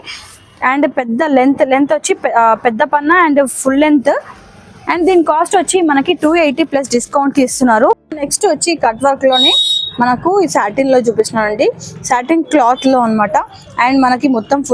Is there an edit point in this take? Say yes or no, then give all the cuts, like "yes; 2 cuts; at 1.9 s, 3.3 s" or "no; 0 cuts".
yes; 1 cut; at 8.1 s